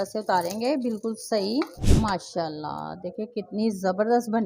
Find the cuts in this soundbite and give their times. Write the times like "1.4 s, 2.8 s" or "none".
1.8 s